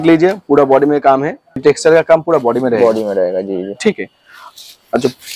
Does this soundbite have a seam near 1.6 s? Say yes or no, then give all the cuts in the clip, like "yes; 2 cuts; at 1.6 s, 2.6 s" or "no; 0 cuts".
yes; 1 cut; at 1.6 s